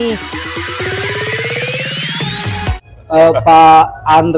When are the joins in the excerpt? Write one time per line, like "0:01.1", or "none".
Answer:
0:03.1